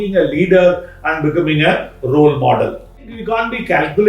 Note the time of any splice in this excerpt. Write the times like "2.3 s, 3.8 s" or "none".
3.1 s